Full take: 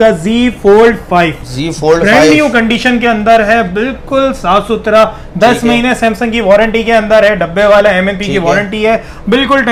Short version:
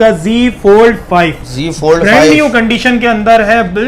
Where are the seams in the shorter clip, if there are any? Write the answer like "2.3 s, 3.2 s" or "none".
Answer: none

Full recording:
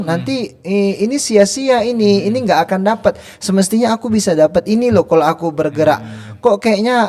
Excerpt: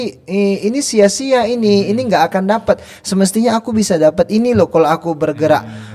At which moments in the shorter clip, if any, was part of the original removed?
none

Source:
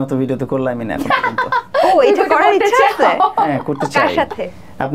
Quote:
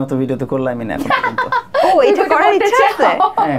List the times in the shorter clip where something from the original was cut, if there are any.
none

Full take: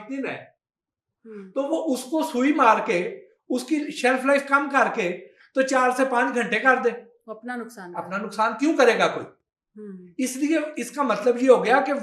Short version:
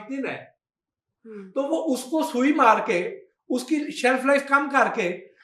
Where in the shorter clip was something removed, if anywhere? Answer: none

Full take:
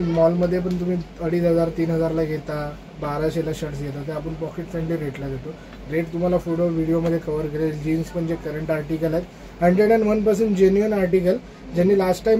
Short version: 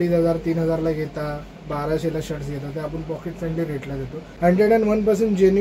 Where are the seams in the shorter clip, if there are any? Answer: 4.2 s

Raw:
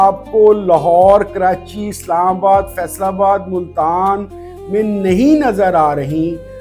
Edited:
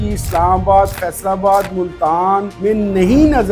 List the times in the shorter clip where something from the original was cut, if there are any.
2.5 s

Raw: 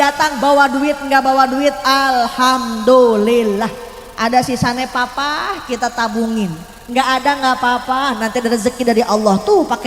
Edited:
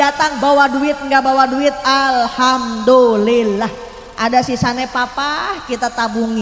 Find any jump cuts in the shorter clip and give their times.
none

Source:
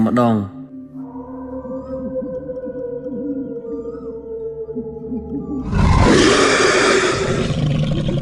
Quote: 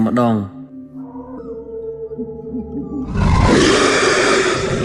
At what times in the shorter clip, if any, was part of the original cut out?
1.4 s

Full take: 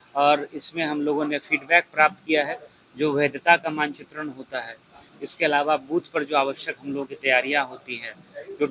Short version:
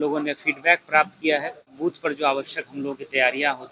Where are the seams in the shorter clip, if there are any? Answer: 1.8 s

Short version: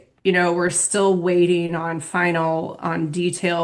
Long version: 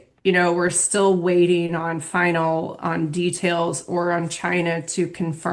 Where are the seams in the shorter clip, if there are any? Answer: none

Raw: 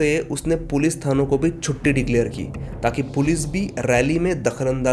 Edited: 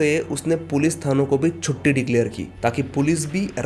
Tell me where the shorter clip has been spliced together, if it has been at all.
2.4 s

